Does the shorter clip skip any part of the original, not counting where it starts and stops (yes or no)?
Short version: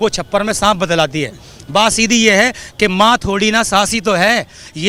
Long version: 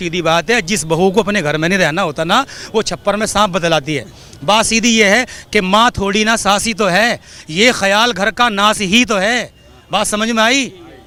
no